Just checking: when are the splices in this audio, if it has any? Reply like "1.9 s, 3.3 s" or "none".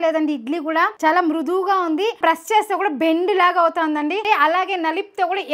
0.9 s, 2.2 s